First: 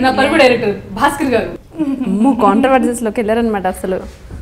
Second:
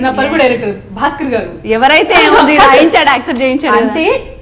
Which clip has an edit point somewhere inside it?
first; 1 cut; at 1.6 s

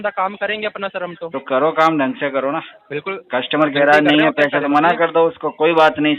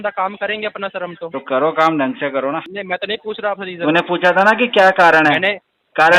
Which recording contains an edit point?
second; 1 cut; at 2.7 s

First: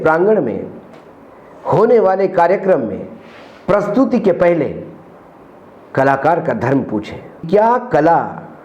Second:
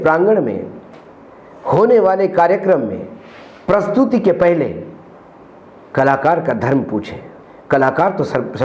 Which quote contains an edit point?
first; 1 cut; at 7.4 s

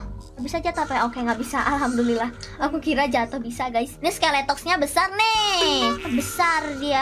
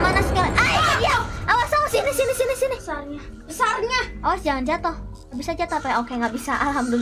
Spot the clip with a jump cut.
first; 1 cut; at 6.1 s

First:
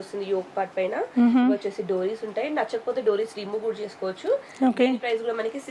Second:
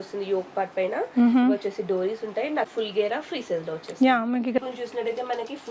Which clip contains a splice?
second; 2 cuts; at 2.7 s, 4.6 s

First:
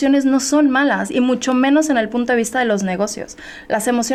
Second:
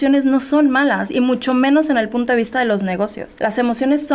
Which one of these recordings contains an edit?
second; 1 cut; at 3.2 s

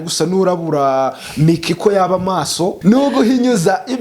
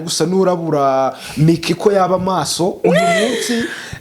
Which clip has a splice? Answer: first; 1 cut; at 2.8 s

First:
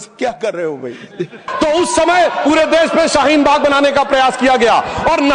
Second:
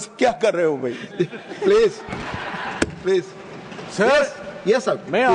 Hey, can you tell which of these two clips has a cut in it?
first; 1 cut; at 1.4 s

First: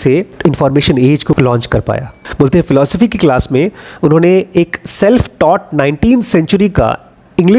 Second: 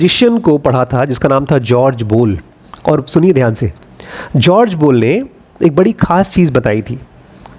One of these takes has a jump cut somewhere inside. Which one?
first; 2 cuts; at 1.4 s, 2.2 s

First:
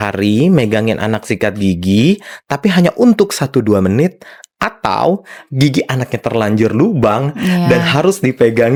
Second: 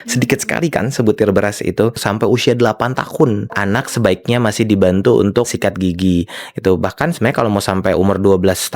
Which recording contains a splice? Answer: second; 3 cuts; at 2.0 s, 3.8 s, 5.5 s

